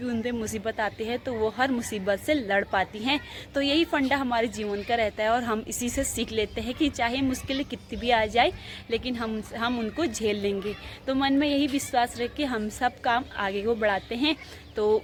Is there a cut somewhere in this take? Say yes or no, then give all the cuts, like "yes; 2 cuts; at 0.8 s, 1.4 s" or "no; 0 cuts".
no; 0 cuts